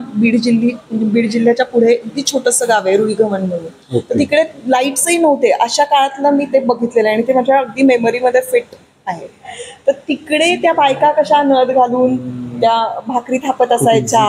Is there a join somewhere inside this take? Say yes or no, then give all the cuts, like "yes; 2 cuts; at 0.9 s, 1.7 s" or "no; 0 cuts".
no; 0 cuts